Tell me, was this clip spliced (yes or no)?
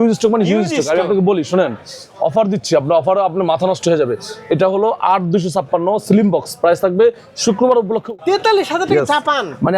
yes